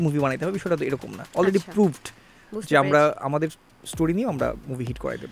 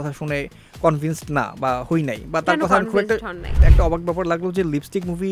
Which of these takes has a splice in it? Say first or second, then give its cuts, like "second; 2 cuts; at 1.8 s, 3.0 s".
second; 1 cut; at 3.7 s